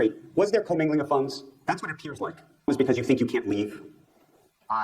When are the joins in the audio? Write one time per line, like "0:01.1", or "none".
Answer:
0:02.7